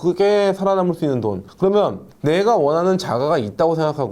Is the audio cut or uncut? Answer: uncut